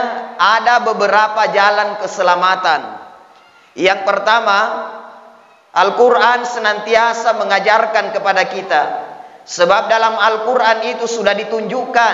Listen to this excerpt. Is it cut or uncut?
uncut